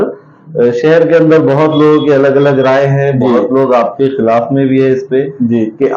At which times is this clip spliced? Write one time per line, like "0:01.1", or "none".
none